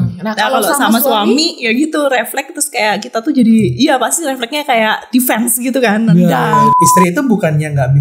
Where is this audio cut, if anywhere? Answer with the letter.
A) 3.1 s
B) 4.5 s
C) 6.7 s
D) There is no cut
C